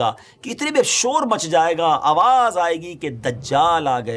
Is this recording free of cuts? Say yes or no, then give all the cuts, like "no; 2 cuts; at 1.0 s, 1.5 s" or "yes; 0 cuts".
yes; 0 cuts